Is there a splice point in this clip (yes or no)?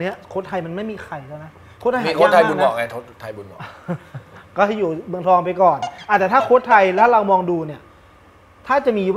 no